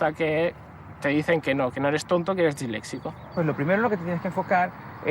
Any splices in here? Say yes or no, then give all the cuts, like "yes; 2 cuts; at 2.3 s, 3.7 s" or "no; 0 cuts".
yes; 1 cut; at 3.3 s